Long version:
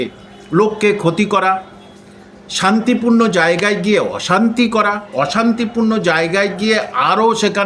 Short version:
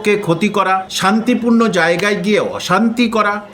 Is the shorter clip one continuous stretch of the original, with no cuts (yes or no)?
no